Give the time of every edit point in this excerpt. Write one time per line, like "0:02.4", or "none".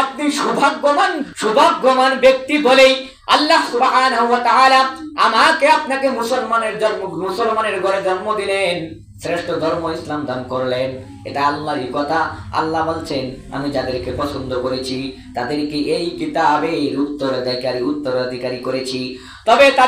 0:01.2